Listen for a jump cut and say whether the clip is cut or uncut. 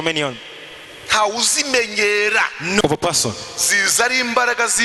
cut